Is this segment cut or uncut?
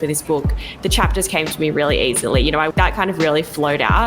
cut